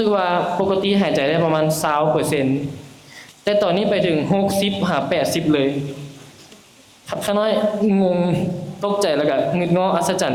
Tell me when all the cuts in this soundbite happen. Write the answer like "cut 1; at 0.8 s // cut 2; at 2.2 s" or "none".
none